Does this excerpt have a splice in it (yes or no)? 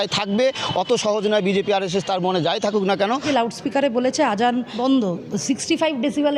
yes